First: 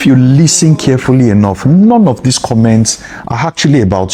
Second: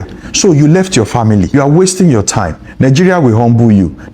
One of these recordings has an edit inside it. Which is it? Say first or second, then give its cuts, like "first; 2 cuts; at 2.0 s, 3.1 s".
second; 1 cut; at 1.5 s